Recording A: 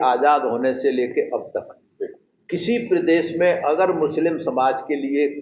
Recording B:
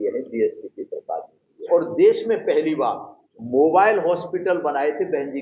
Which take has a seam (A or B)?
B